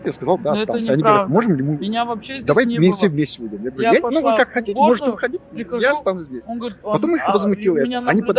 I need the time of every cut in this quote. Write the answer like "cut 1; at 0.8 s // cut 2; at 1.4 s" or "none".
none